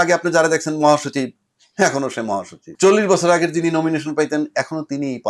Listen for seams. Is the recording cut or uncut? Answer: cut